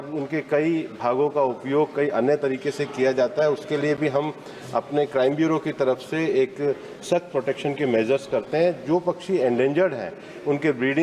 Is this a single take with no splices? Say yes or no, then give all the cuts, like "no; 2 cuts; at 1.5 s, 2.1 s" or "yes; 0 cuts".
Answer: yes; 0 cuts